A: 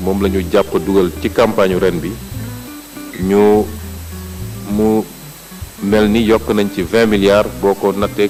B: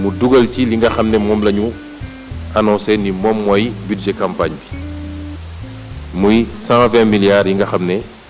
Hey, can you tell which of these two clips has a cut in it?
B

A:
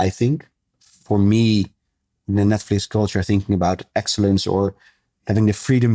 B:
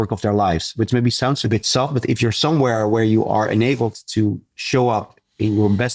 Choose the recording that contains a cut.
B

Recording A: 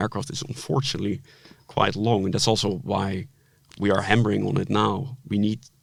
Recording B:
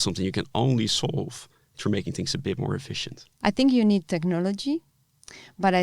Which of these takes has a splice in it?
B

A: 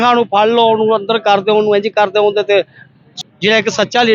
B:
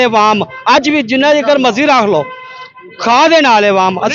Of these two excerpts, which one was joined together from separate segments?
A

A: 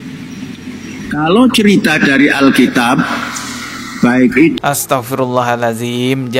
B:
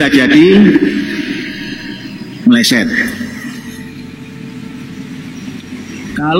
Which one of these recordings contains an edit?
A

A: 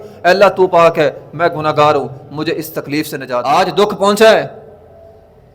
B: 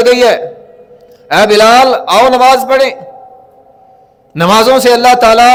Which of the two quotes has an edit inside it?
A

